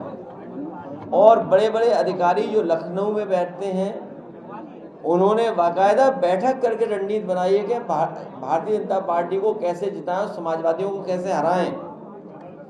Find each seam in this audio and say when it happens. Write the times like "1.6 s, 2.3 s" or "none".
none